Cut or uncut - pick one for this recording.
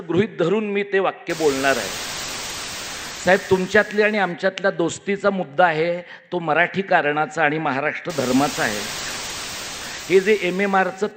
cut